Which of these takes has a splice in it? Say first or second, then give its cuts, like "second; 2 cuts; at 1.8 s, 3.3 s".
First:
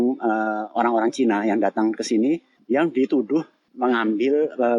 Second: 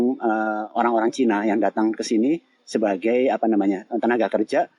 first; 2 cuts; at 2.5 s, 3.6 s